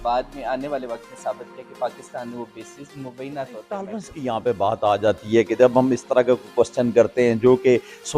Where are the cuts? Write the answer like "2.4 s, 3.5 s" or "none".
4.0 s